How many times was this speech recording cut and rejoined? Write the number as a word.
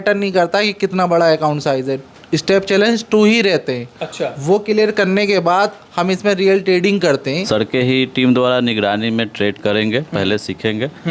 one